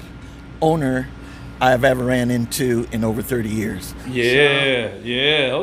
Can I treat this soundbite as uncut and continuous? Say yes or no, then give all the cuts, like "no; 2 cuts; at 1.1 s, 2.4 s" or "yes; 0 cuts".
no; 1 cut; at 3.9 s